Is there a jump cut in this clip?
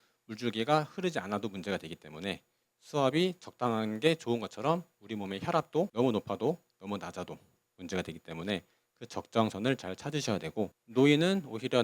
yes; 1 cut; at 10.8 s

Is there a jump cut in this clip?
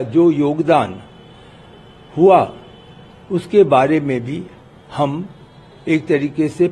no; 0 cuts

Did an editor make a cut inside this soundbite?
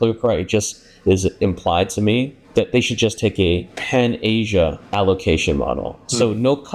yes; 1 cut; at 2.4 s

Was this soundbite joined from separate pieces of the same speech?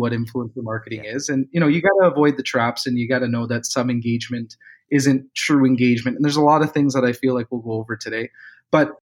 no; 0 cuts

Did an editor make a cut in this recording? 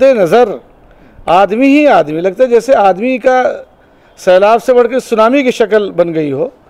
no; 0 cuts

